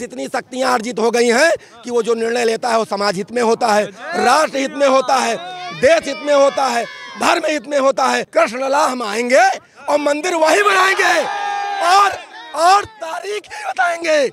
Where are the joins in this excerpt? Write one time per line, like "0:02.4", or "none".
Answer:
0:08.2